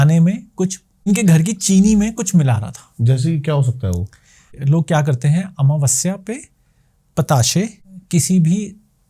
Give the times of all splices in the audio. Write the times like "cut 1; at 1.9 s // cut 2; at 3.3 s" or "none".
cut 1; at 1.1 s // cut 2; at 4.6 s // cut 3; at 7.9 s